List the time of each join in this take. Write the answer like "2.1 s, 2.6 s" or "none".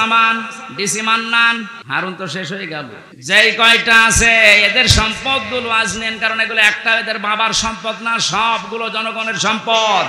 1.8 s, 3.1 s